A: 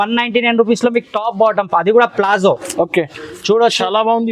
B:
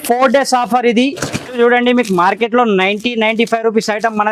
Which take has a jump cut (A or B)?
B